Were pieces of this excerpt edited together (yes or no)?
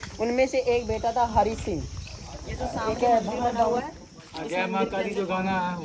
yes